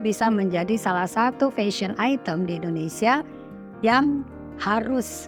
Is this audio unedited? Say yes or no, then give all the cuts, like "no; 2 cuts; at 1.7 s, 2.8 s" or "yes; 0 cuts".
yes; 0 cuts